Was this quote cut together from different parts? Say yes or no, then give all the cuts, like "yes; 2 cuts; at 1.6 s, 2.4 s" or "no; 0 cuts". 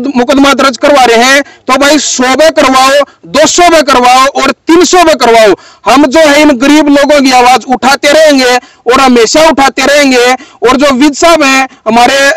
no; 0 cuts